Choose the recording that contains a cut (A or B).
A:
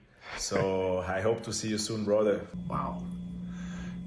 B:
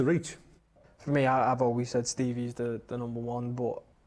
A